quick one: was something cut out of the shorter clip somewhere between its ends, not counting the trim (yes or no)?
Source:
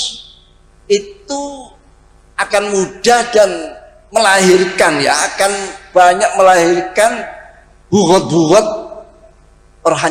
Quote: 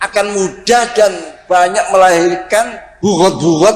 yes